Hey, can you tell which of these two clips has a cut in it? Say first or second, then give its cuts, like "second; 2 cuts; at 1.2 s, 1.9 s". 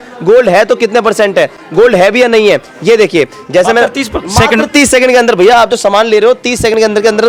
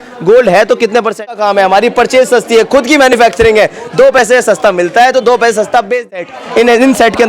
second; 2 cuts; at 1.3 s, 6.1 s